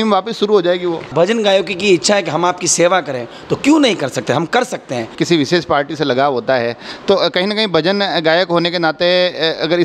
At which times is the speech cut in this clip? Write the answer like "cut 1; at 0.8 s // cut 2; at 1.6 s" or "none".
cut 1; at 1.1 s // cut 2; at 5.1 s